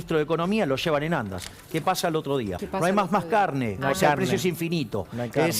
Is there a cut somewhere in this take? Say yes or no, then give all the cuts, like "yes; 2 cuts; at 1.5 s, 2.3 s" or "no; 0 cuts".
yes; 1 cut; at 2.6 s